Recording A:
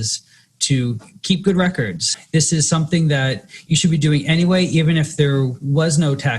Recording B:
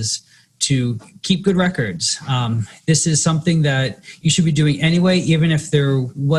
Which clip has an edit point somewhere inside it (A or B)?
A